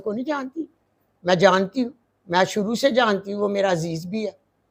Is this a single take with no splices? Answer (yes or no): yes